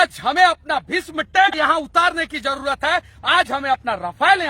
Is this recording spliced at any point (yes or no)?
yes